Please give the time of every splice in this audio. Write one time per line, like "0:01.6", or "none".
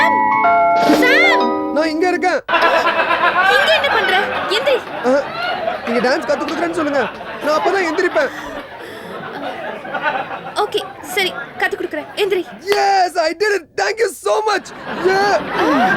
none